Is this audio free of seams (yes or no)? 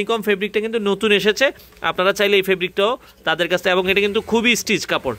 yes